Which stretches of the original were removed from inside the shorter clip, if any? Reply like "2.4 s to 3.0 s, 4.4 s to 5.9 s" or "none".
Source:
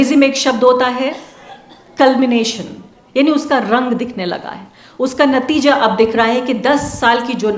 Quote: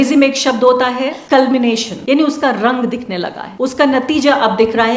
1.2 s to 1.9 s, 2.6 s to 3.0 s, 4.5 s to 4.8 s